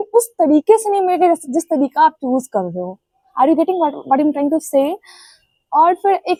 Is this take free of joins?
yes; 0 cuts

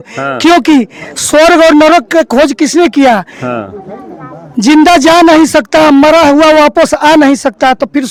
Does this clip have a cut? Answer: no; 0 cuts

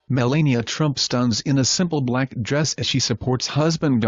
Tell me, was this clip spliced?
yes; 1 cut; at 0.9 s

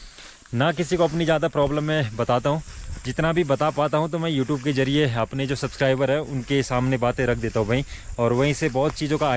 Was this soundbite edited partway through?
no; 0 cuts

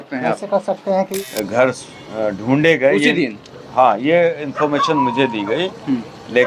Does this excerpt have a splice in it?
yes; 1 cut; at 1.1 s

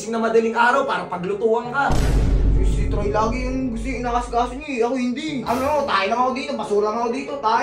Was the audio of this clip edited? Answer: yes; 1 cut; at 5.4 s

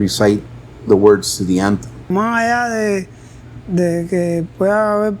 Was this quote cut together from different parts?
yes; 1 cut; at 2.1 s

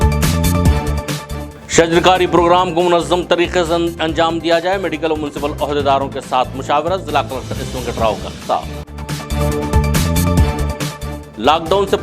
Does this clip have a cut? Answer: yes; 1 cut; at 1.5 s

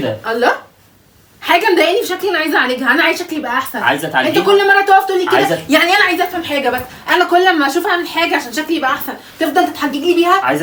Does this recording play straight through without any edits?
yes; 0 cuts

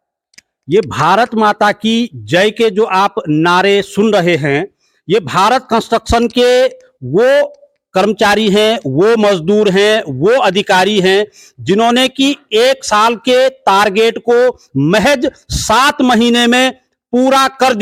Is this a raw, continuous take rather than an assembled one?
yes; 0 cuts

